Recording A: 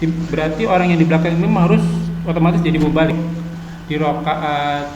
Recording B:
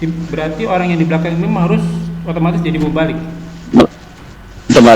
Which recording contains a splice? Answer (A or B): A